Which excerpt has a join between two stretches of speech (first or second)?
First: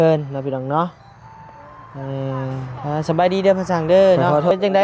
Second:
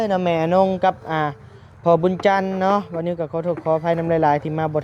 first